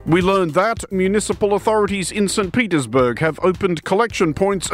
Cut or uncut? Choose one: cut